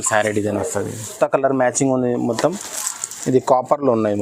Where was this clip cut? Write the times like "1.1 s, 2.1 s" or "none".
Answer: 1.2 s